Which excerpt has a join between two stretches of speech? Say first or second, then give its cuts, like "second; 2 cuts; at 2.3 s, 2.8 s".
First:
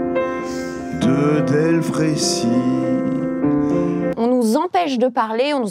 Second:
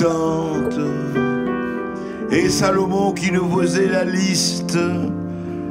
first; 1 cut; at 4.1 s